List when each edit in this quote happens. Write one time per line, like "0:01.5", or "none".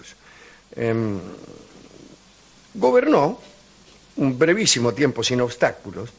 none